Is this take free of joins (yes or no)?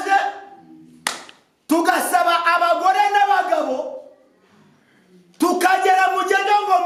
yes